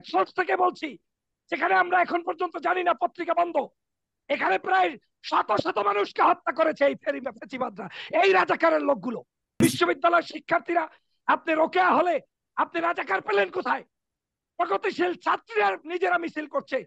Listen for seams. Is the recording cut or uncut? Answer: cut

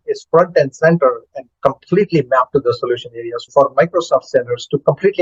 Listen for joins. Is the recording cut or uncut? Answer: cut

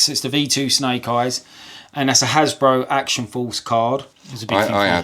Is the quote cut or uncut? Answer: cut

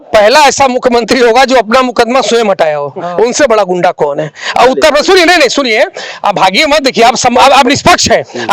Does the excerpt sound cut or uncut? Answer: uncut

